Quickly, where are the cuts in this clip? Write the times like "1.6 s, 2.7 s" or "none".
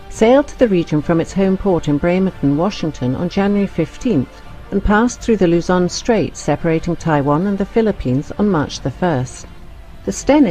1.3 s